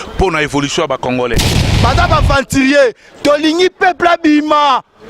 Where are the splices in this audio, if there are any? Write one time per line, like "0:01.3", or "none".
0:01.6